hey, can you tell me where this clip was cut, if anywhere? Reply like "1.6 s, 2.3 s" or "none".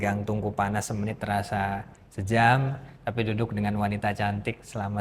none